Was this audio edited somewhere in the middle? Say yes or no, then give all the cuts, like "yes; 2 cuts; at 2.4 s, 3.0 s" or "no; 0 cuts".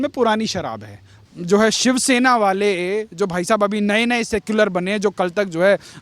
yes; 1 cut; at 1.2 s